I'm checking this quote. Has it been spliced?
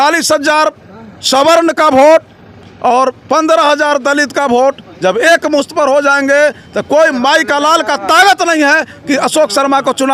no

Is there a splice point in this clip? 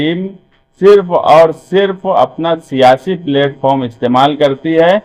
no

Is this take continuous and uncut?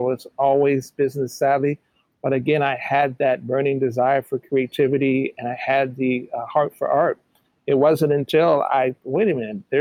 yes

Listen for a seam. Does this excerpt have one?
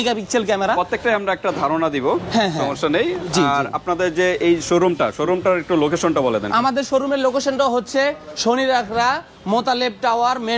no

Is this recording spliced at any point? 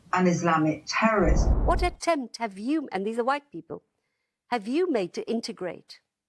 yes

